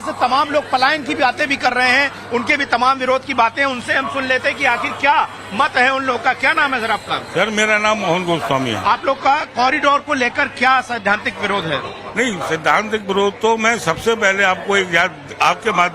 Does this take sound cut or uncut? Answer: cut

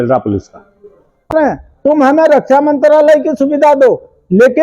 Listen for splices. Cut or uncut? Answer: cut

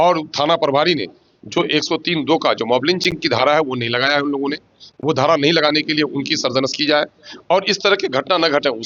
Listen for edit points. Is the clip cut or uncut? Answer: uncut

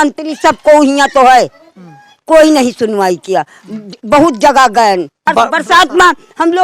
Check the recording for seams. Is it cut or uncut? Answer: cut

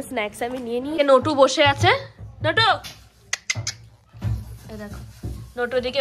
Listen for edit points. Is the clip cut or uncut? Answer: cut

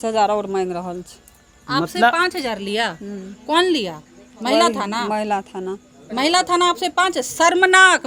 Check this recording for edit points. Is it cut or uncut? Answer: uncut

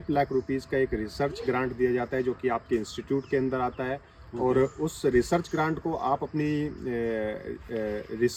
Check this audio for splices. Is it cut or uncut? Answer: uncut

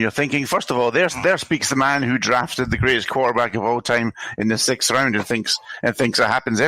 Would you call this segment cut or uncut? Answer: uncut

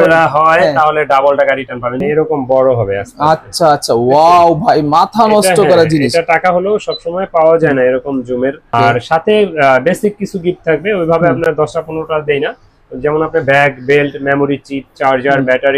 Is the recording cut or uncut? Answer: cut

